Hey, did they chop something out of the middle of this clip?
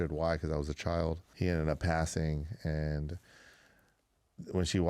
yes; 1 cut; at 1.3 s

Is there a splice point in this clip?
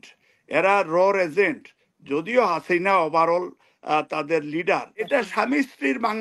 yes; 1 cut; at 5.1 s

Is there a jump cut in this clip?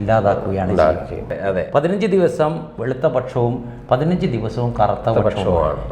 yes; 1 cut; at 1.3 s

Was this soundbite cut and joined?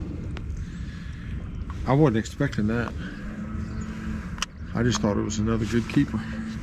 no; 0 cuts

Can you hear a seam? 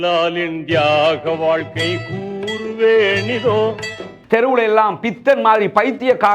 yes; 1 cut; at 4.0 s

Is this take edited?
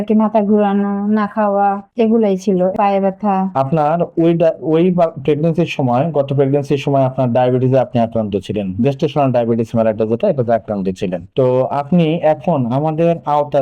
yes; 1 cut; at 3.5 s

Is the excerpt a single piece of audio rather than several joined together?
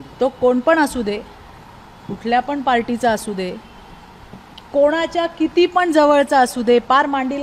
yes; 0 cuts

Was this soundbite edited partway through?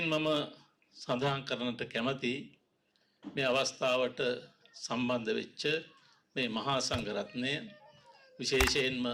no; 0 cuts

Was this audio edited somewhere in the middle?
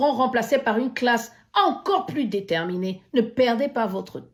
no; 0 cuts

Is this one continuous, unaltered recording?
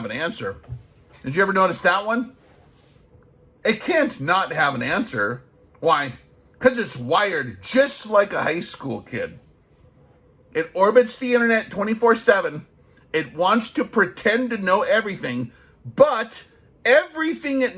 yes; 0 cuts

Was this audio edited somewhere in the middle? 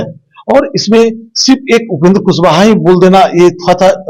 no; 0 cuts

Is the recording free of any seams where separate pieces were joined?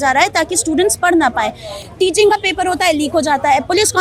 yes; 0 cuts

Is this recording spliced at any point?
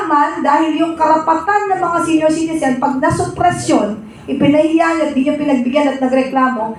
no; 0 cuts

